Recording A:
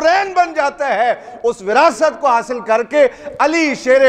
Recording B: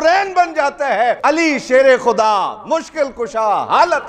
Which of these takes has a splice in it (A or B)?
B